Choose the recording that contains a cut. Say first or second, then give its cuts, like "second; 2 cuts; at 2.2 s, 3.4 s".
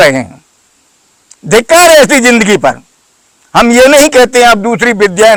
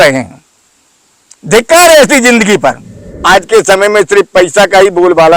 second; 1 cut; at 3.1 s